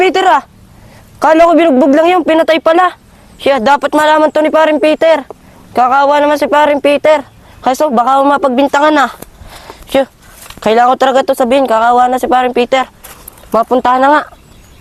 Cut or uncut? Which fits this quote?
uncut